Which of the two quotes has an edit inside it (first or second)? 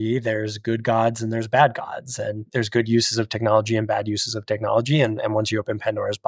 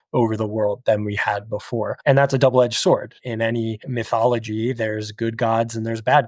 second